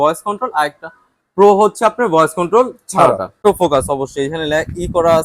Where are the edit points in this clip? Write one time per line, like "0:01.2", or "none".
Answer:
0:03.4